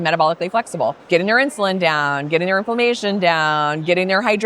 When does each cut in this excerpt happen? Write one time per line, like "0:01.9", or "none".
0:01.0